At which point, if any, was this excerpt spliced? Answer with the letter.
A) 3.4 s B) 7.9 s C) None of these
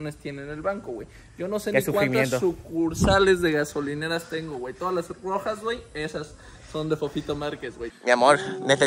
B